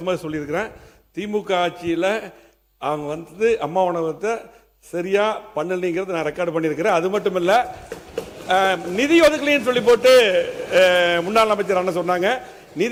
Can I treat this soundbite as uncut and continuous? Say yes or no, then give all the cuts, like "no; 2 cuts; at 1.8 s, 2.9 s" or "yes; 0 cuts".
yes; 0 cuts